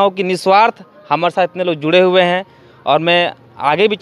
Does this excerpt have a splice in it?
no; 0 cuts

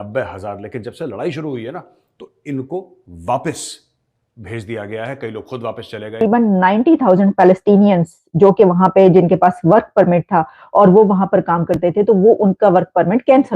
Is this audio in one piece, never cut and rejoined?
no; 1 cut; at 6.2 s

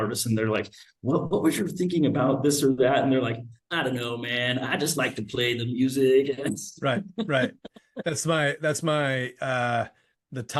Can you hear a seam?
no; 0 cuts

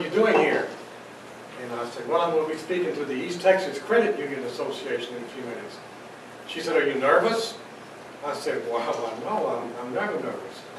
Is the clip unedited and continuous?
no; 1 cut; at 4.7 s

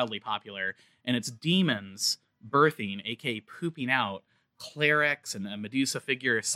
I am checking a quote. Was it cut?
no; 0 cuts

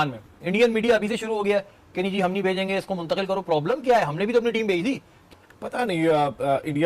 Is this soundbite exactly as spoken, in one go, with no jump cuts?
no; 1 cut; at 5.1 s

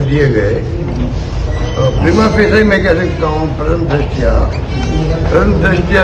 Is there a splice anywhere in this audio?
no; 0 cuts

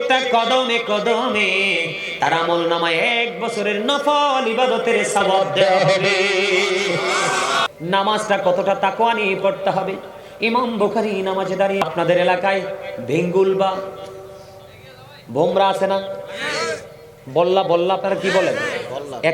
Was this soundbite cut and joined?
yes; 2 cuts; at 7.7 s, 11.9 s

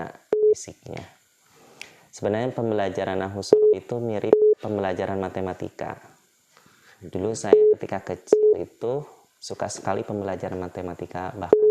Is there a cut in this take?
no; 0 cuts

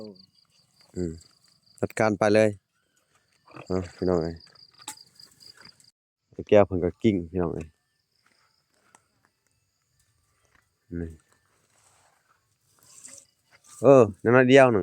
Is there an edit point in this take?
yes; 1 cut; at 5.9 s

